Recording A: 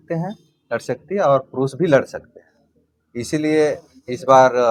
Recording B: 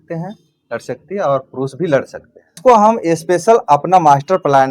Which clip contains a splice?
B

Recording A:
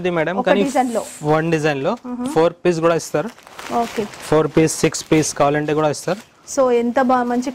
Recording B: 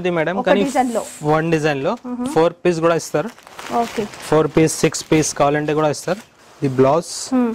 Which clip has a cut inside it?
B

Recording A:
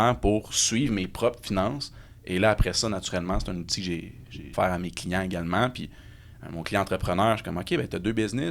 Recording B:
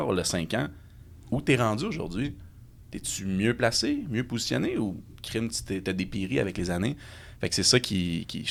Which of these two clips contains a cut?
A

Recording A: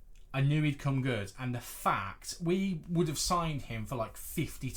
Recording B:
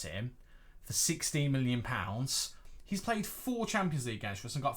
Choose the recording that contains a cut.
B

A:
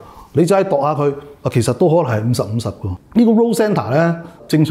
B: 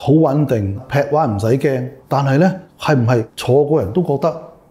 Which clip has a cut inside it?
A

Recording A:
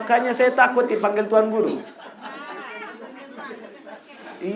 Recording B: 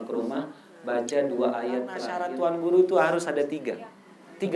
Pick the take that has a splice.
B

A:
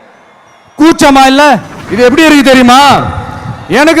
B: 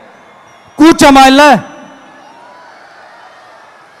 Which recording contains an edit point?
A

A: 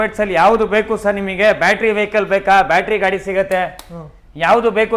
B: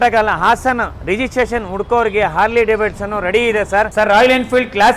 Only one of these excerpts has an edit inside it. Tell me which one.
B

